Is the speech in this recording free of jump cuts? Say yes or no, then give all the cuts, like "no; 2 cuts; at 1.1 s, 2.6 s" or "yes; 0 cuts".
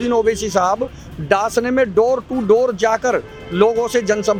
yes; 0 cuts